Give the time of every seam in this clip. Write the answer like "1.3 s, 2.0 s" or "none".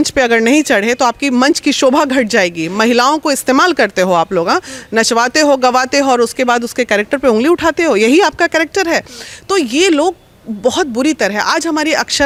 none